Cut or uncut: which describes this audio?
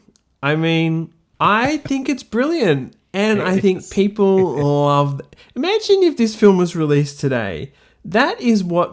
cut